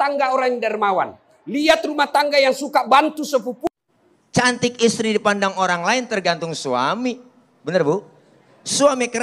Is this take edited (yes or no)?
yes